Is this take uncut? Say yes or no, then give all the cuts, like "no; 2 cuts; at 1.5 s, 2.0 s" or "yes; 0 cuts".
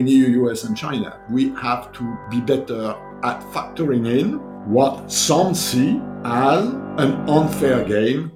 no; 6 cuts; at 1.2 s, 2.2 s, 3.5 s, 4.5 s, 6.1 s, 6.8 s